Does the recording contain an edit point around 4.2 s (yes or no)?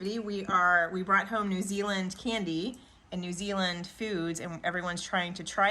no